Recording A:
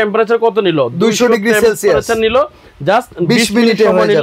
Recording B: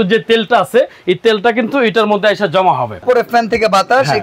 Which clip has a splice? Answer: B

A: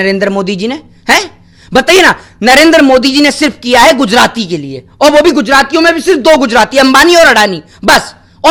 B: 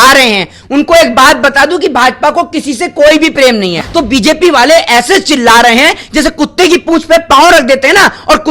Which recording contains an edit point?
B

